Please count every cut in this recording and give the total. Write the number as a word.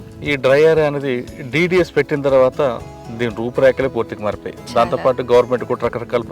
zero